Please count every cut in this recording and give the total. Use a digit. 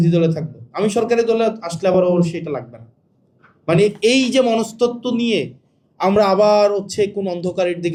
0